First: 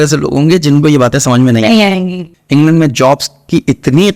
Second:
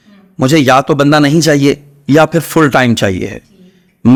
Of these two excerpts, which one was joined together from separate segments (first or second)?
first